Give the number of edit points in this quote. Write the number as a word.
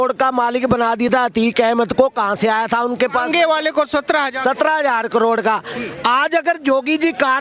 zero